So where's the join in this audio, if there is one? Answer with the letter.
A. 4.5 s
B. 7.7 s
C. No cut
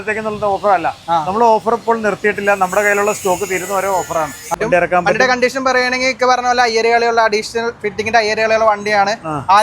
A